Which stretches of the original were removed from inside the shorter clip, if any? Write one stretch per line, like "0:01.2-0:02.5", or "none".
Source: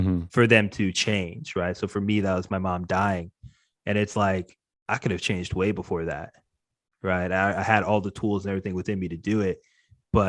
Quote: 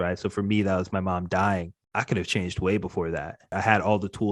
0:03.4-0:04.7
0:06.5-0:07.6